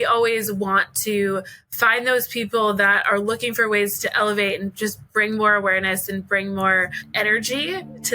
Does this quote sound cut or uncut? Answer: cut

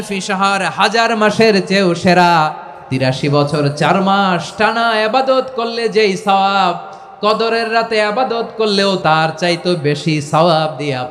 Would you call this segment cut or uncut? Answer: cut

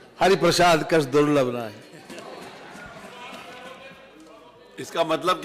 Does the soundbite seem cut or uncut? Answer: uncut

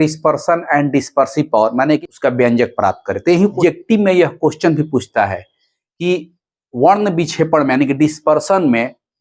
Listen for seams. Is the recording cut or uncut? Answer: cut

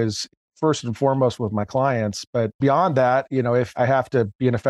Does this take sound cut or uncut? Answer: cut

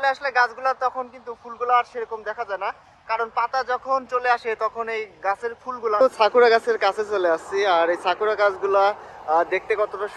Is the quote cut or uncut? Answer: cut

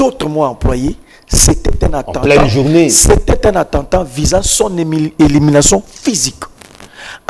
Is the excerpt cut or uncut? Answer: uncut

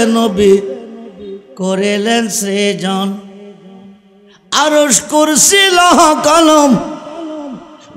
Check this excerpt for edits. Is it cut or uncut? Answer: uncut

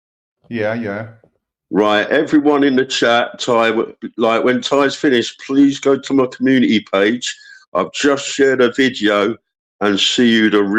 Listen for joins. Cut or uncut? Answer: uncut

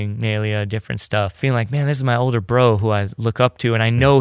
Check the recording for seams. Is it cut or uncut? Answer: cut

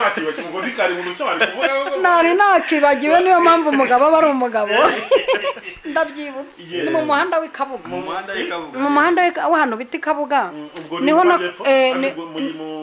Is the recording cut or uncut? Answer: uncut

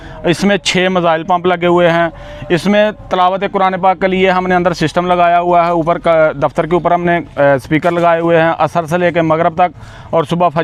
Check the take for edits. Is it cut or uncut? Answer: uncut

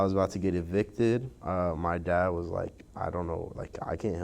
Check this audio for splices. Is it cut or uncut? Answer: cut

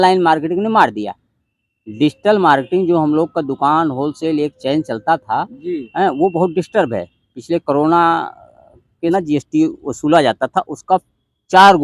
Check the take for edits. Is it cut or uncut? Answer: cut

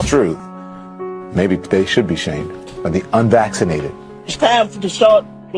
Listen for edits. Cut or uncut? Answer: cut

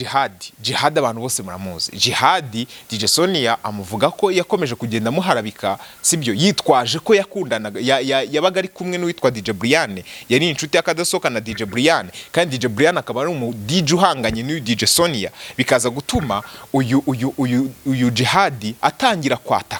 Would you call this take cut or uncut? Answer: uncut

